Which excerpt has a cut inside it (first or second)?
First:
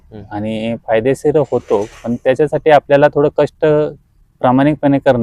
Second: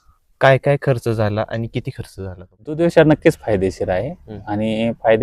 second